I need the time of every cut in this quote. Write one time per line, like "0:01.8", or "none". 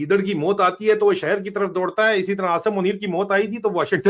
none